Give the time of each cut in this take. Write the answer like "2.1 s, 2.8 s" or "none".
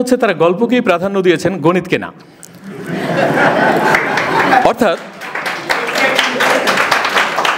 none